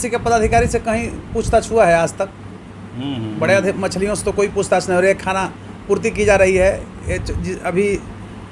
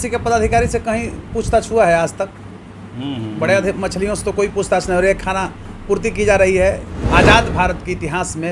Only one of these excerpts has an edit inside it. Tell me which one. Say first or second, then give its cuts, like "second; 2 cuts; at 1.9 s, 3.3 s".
second; 1 cut; at 6.9 s